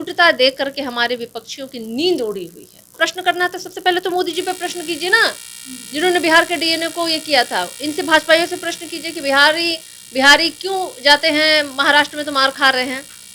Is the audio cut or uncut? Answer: cut